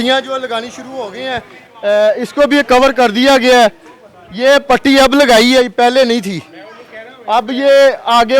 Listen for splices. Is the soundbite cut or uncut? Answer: uncut